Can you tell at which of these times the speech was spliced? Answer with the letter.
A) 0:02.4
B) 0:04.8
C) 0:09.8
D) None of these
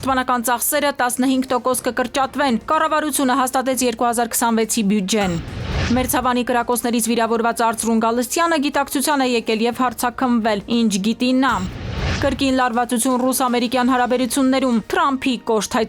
D